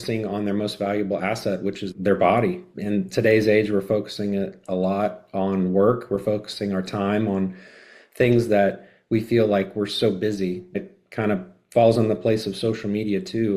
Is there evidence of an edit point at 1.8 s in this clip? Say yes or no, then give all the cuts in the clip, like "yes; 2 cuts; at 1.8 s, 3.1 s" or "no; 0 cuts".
yes; 3 cuts; at 1.8 s, 2.7 s, 10.8 s